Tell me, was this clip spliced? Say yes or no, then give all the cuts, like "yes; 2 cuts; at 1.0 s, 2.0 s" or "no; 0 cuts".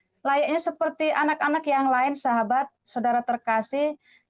no; 0 cuts